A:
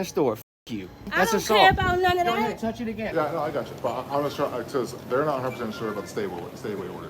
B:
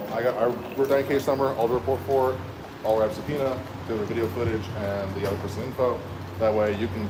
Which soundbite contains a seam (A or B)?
A